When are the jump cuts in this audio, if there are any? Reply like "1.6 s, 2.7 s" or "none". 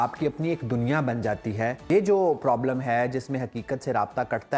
1.8 s